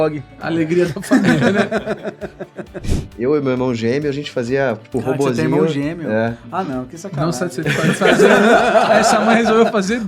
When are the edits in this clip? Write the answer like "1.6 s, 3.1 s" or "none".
2.8 s